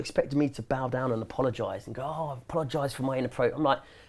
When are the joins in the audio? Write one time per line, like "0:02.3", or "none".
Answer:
none